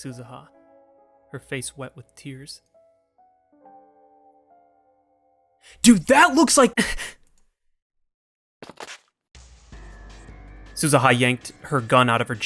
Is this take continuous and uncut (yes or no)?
no